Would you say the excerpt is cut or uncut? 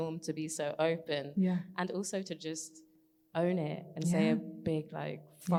uncut